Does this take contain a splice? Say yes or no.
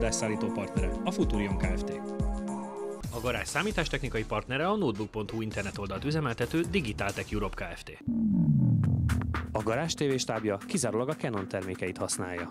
no